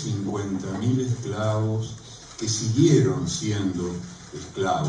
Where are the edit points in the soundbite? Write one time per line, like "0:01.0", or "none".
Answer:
0:01.4